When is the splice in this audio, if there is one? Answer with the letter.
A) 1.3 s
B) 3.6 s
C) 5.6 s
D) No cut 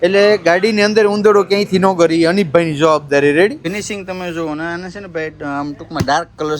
B